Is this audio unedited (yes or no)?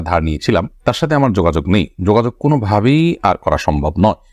yes